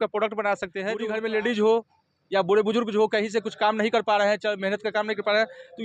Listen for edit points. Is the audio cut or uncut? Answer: cut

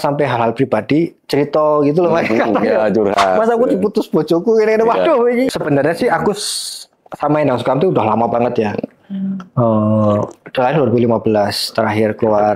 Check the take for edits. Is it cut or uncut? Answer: cut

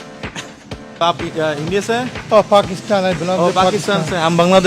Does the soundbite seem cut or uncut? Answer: cut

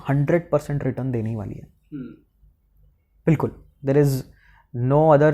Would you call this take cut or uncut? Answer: uncut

